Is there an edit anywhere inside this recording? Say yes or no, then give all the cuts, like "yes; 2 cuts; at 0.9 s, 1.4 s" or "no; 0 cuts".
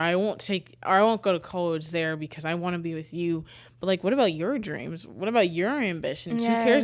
no; 0 cuts